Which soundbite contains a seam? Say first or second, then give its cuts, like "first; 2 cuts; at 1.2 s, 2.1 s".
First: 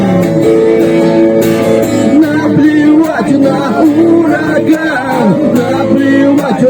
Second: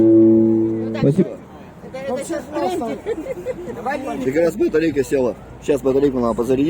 second; 1 cut; at 3.4 s